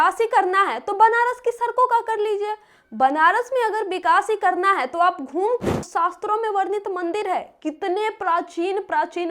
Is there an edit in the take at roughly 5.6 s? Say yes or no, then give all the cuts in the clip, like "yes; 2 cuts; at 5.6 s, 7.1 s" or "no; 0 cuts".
yes; 1 cut; at 5.6 s